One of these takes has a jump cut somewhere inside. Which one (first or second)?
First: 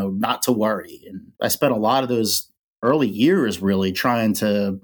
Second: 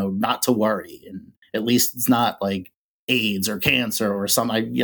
first